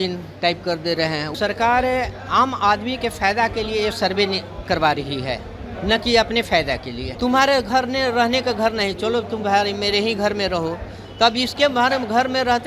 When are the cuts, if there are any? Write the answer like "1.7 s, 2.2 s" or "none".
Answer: 1.3 s, 7.0 s